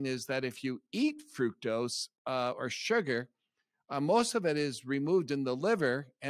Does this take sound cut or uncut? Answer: uncut